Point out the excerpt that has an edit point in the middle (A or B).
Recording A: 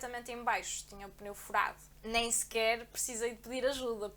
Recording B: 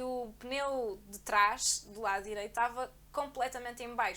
A